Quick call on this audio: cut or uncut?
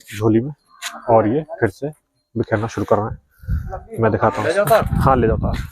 uncut